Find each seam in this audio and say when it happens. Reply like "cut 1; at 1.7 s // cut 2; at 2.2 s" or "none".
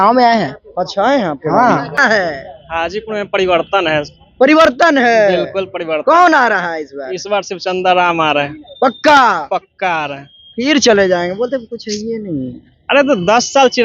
cut 1; at 2.0 s